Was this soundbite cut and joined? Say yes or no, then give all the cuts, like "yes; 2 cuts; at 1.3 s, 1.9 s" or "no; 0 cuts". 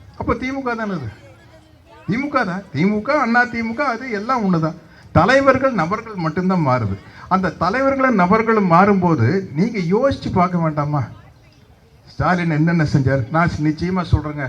no; 0 cuts